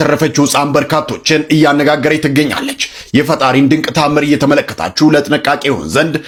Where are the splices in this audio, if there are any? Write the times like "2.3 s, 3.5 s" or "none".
none

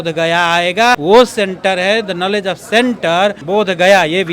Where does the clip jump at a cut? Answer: 1.0 s, 3.4 s

